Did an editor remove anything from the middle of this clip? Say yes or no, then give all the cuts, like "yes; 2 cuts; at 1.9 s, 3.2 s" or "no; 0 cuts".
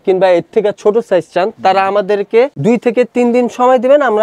no; 0 cuts